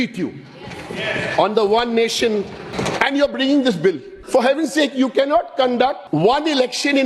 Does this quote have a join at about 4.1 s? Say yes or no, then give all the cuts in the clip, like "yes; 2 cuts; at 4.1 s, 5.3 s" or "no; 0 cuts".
yes; 3 cuts; at 2.7 s, 4.1 s, 6.0 s